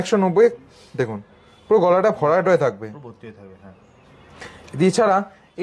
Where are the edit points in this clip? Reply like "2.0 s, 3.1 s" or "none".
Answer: none